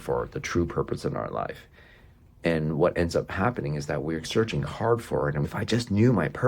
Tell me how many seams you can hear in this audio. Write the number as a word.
one